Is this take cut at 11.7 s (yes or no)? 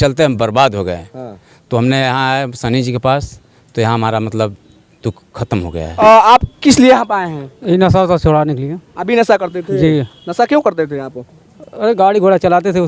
no